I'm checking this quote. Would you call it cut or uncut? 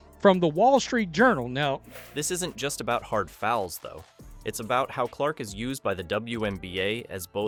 uncut